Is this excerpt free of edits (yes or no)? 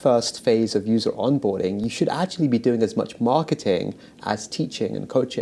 yes